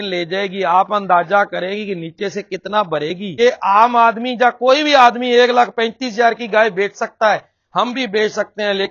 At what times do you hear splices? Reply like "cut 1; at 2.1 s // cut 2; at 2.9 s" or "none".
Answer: cut 1; at 3.3 s